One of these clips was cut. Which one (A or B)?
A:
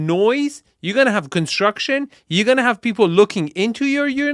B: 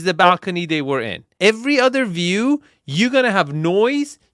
B